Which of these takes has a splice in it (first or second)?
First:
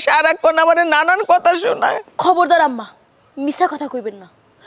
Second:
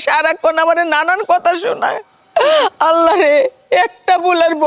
first